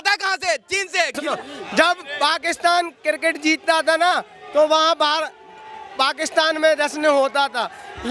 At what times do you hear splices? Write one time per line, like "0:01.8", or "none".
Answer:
0:01.3